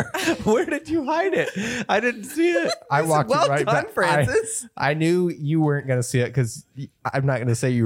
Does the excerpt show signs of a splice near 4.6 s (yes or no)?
no